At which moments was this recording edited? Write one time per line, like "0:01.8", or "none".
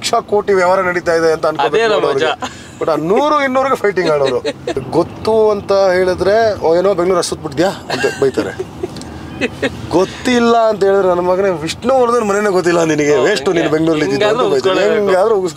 0:04.8